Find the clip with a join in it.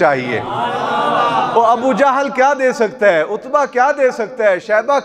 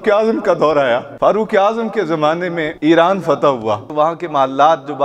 second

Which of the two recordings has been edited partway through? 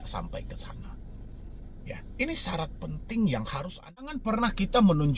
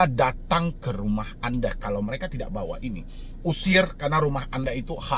first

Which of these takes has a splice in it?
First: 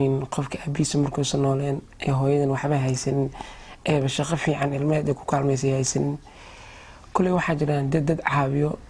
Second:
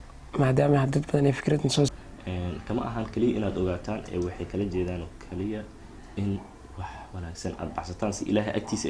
second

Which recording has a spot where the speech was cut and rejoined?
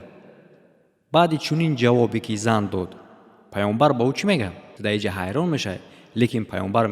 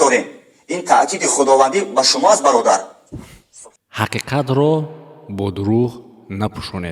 first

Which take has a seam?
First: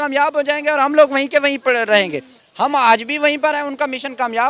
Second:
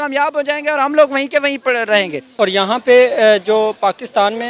second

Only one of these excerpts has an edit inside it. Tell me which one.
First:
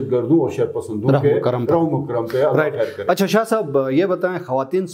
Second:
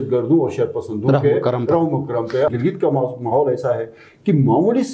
second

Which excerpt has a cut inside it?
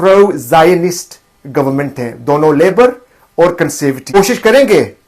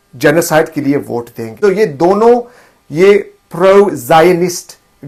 first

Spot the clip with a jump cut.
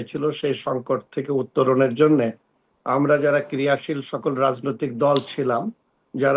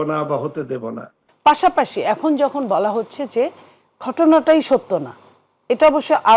second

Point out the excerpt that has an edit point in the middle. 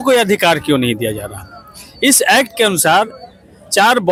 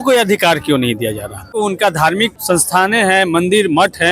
second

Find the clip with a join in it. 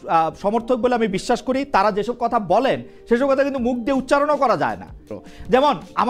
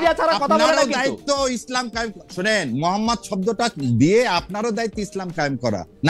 first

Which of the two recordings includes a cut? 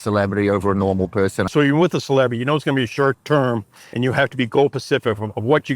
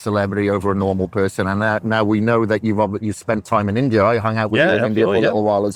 first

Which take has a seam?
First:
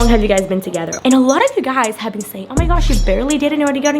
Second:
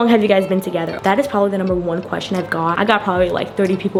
first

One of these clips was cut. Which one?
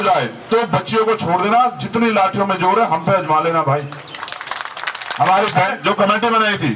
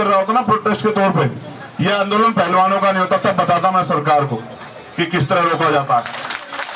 first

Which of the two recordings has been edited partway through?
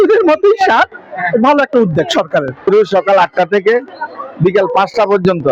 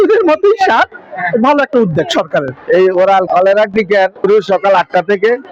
first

